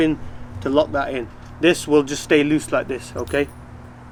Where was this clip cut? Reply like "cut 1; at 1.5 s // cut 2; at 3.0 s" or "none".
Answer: none